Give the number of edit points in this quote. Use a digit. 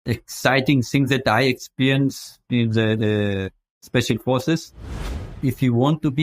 1